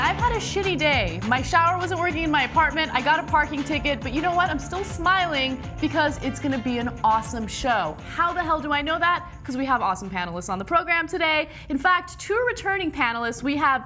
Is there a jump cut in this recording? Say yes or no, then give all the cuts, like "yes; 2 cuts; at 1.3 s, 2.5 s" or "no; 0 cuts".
no; 0 cuts